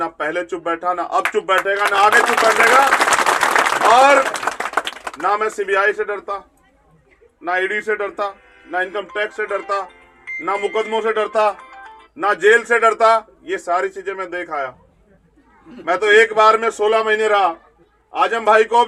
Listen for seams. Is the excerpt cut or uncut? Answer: uncut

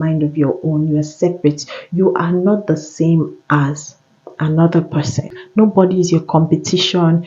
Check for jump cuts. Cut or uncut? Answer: cut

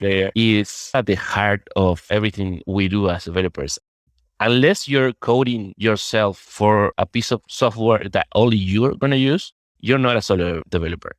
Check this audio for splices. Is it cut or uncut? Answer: cut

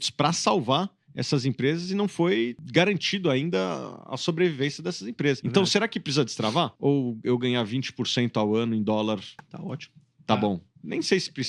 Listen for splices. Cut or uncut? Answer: cut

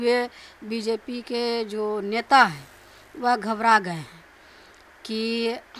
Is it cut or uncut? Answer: uncut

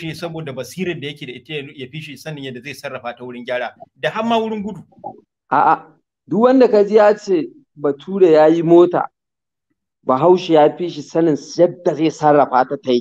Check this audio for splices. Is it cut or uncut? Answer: uncut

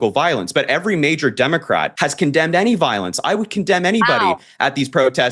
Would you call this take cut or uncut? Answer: cut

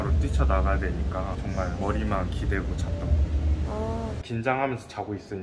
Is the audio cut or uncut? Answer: cut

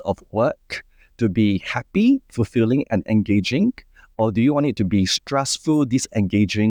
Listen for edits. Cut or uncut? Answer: uncut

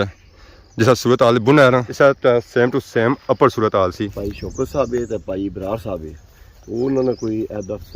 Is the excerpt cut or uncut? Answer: cut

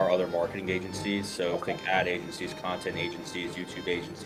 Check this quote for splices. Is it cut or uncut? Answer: uncut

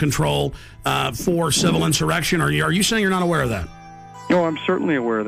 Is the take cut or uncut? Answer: cut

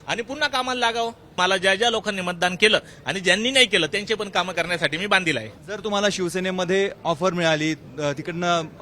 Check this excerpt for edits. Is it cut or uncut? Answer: cut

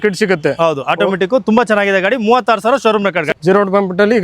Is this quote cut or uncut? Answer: cut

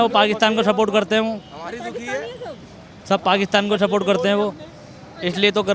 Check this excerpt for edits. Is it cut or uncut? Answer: uncut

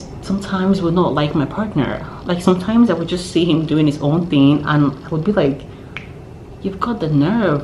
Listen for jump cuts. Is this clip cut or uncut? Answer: uncut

